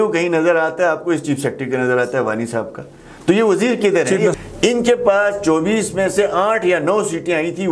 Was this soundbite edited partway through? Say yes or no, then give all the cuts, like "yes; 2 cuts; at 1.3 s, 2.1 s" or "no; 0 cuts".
yes; 1 cut; at 4.3 s